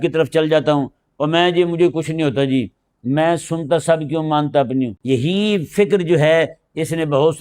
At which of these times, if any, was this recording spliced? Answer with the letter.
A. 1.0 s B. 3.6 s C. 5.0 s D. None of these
C